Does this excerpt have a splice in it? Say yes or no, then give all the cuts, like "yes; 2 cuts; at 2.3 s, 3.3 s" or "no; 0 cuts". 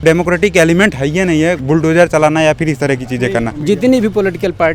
yes; 2 cuts; at 1.6 s, 3.5 s